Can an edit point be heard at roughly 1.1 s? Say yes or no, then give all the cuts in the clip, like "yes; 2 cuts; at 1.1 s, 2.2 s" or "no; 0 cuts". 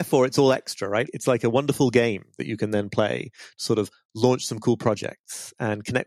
yes; 1 cut; at 1.1 s